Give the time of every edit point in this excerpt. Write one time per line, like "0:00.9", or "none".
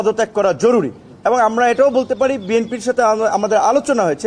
none